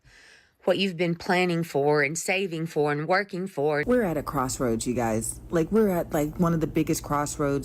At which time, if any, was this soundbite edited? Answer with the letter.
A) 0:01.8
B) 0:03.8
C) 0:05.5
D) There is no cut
B